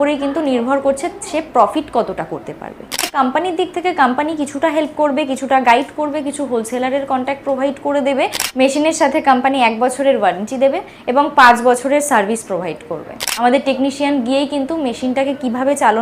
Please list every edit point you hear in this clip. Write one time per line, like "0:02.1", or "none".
0:03.0
0:08.4
0:13.2

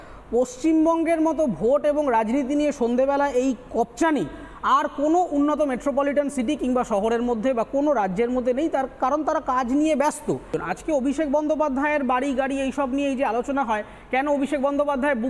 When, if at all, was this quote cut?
0:10.6

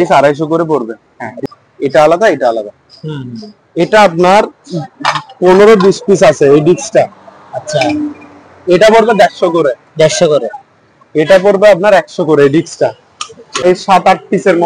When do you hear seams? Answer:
0:01.4
0:13.6

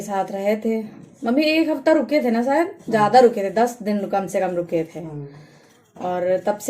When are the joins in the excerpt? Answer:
none

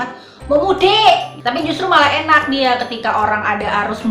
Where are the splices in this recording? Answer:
0:01.3

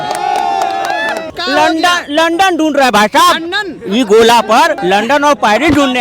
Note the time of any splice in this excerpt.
0:01.3
0:04.8

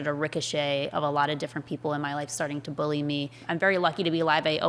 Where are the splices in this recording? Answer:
0:03.4

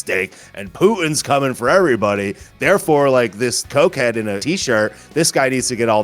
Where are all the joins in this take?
0:03.6
0:04.4

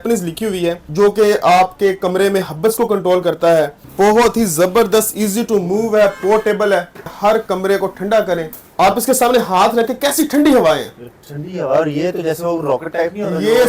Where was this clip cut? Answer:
0:00.9
0:03.8
0:07.1
0:08.6

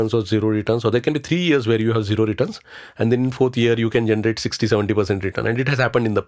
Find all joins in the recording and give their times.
0:03.3

